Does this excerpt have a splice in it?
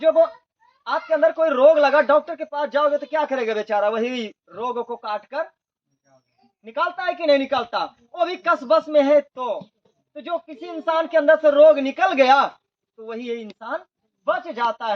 no; 0 cuts

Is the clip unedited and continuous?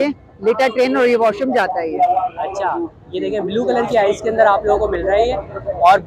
yes; 0 cuts

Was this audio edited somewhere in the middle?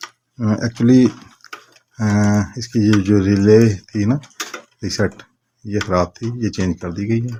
no; 0 cuts

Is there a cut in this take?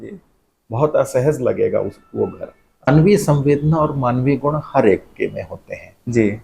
yes; 1 cut; at 2.9 s

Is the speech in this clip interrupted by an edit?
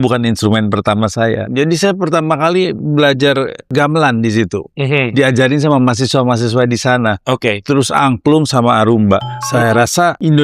yes; 3 cuts; at 1.5 s, 3.6 s, 9.5 s

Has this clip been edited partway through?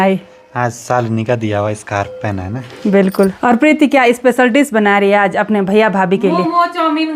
yes; 1 cut; at 3.4 s

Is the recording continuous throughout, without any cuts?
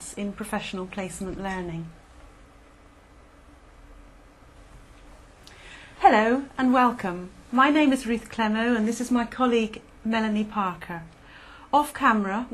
no; 1 cut; at 10.5 s

